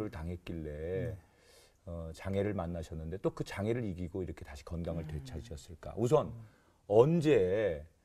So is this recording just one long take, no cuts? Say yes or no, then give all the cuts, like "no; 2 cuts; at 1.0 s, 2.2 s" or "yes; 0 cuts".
yes; 0 cuts